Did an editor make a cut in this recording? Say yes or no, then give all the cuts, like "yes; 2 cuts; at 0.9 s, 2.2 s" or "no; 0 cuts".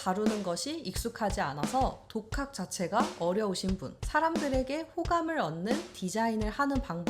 yes; 1 cut; at 3.9 s